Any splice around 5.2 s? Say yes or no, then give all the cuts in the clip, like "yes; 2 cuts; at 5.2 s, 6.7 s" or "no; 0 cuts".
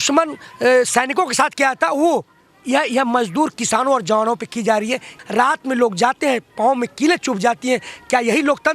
yes; 1 cut; at 5.2 s